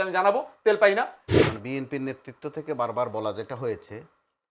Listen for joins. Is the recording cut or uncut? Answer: cut